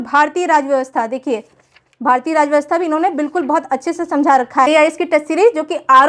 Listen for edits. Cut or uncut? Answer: cut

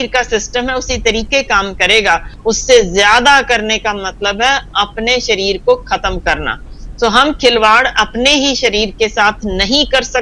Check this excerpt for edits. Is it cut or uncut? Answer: cut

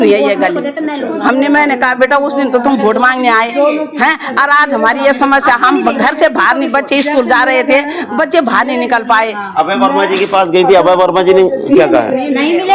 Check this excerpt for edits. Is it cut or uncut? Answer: uncut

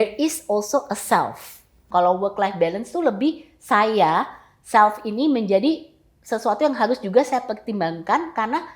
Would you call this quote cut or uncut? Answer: cut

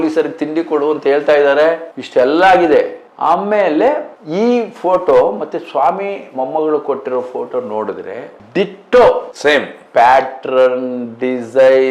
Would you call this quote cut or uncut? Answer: uncut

